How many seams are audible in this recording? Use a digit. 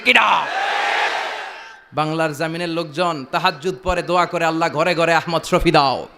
0